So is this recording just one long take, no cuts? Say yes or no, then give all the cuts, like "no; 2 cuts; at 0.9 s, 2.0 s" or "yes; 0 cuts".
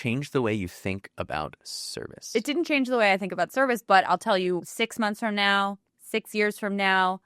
no; 1 cut; at 4.8 s